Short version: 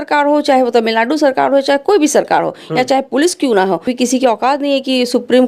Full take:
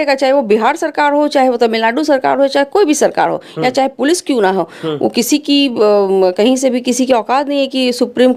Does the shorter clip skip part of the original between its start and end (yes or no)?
yes